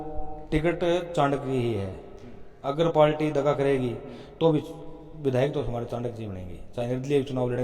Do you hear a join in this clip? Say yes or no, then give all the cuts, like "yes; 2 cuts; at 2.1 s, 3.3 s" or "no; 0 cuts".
no; 0 cuts